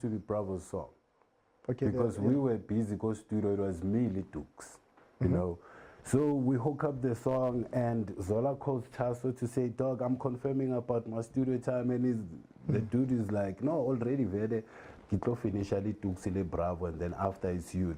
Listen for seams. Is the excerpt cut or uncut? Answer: uncut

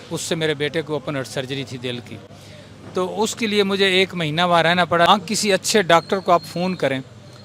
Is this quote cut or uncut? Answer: cut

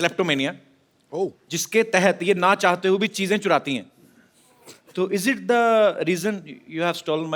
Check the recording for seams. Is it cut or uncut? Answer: uncut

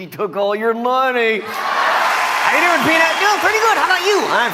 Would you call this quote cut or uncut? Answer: uncut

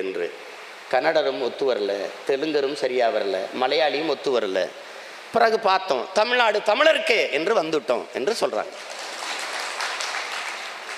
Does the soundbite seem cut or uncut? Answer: uncut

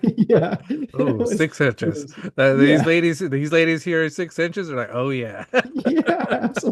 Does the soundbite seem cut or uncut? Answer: uncut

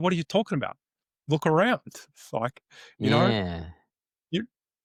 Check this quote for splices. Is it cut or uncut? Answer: uncut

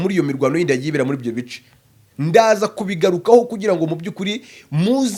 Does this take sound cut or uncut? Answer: uncut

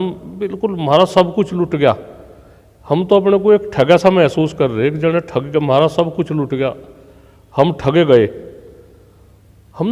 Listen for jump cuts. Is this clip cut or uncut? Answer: uncut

